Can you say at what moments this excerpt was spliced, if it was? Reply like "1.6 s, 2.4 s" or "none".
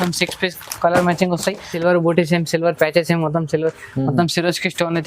1.7 s